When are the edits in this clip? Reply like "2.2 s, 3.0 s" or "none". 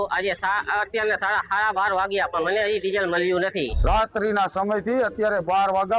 3.8 s